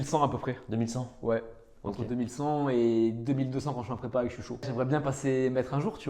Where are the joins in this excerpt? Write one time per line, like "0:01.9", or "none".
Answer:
0:04.7